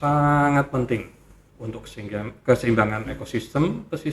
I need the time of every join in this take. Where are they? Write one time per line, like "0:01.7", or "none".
none